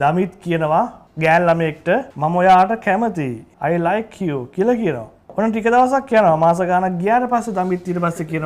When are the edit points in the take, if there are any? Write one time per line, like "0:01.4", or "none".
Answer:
0:01.0
0:02.1
0:03.4
0:05.1